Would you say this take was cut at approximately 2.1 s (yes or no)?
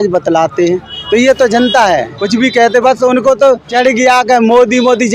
yes